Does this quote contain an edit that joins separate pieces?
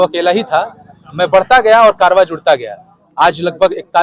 no; 0 cuts

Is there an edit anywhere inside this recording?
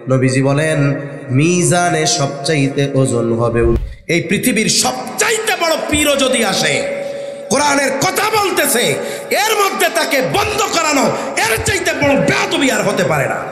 yes; 1 cut; at 3.9 s

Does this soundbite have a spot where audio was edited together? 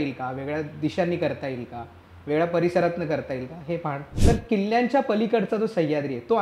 yes; 1 cut; at 4.1 s

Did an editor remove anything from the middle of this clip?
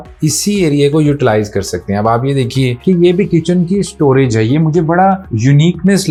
no; 0 cuts

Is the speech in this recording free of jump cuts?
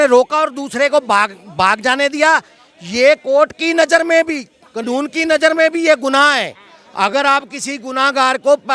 yes; 0 cuts

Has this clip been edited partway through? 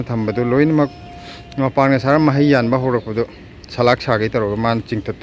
no; 0 cuts

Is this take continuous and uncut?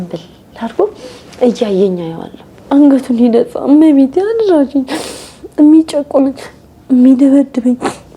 no; 1 cut; at 2.7 s

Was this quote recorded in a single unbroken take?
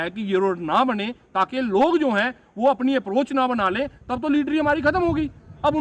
yes; 0 cuts

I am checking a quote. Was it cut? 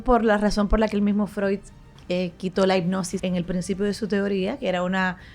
yes; 1 cut; at 3.1 s

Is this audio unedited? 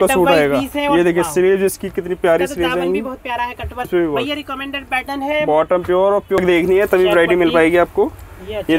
no; 2 cuts; at 3.9 s, 6.4 s

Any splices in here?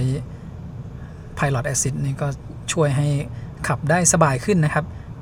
no; 0 cuts

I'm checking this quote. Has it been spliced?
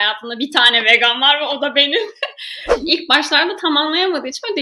yes; 1 cut; at 2.7 s

